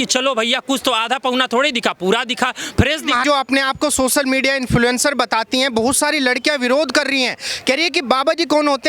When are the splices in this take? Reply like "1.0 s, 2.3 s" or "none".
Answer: none